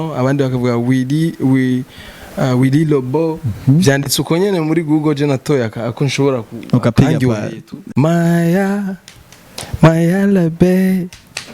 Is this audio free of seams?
no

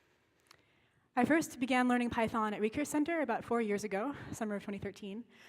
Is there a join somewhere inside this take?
yes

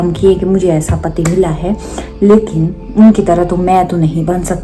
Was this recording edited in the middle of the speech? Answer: no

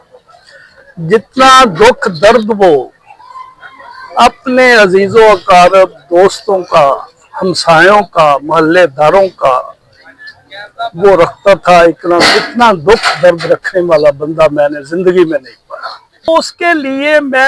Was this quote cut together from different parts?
yes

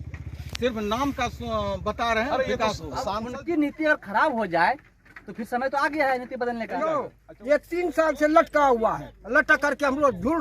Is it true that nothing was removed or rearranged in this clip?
no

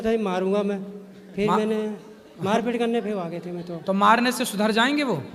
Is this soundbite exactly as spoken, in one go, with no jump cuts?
yes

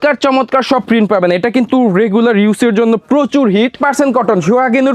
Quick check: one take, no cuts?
no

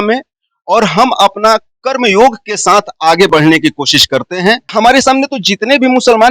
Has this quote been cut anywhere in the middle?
yes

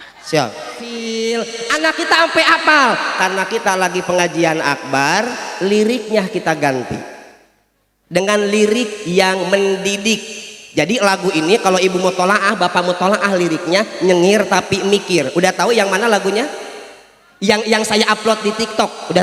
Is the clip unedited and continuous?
no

